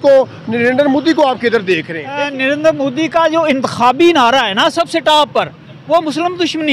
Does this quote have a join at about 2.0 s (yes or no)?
yes